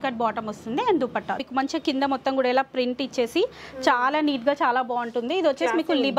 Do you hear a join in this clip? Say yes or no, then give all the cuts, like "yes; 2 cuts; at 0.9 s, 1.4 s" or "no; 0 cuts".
yes; 1 cut; at 1.4 s